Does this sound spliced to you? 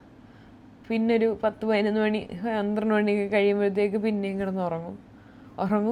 no; 0 cuts

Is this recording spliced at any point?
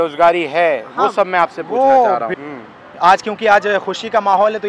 yes; 1 cut; at 2.4 s

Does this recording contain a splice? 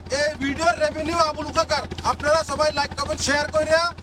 no; 0 cuts

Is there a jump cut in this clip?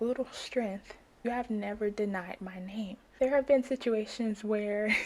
yes; 2 cuts; at 1.2 s, 3.0 s

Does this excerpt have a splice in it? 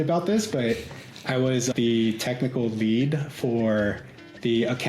yes; 1 cut; at 1.7 s

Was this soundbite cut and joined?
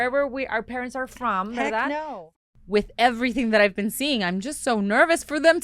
yes; 1 cut; at 2.2 s

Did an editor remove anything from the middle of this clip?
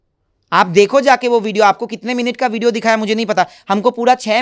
no; 0 cuts

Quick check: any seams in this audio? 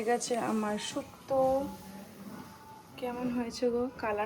no; 0 cuts

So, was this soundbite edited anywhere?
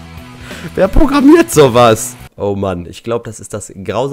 yes; 1 cut; at 2.2 s

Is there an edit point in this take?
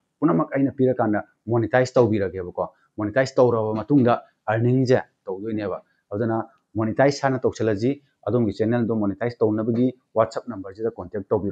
no; 0 cuts

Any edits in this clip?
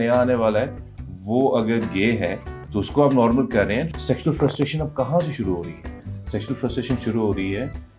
yes; 1 cut; at 3.9 s

